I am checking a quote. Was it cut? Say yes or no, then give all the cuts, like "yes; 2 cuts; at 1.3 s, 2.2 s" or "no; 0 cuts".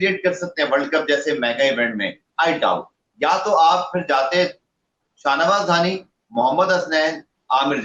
no; 0 cuts